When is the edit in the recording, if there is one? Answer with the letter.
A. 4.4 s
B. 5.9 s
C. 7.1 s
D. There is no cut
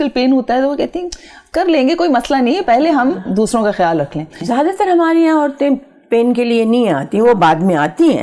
A